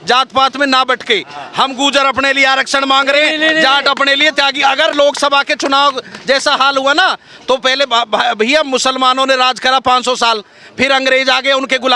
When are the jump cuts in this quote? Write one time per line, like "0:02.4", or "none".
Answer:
none

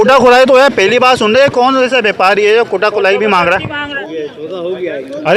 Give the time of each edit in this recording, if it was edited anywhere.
0:03.8

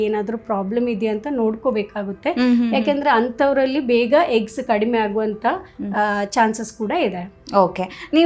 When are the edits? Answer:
none

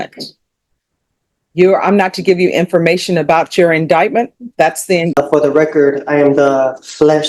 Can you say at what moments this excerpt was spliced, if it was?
0:05.1

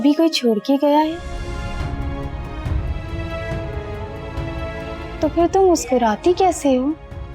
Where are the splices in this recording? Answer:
0:01.3
0:05.1

